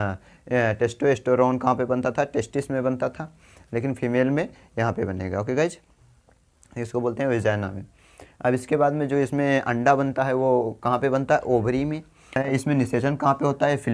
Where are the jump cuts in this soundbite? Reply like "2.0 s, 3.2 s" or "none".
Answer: 12.4 s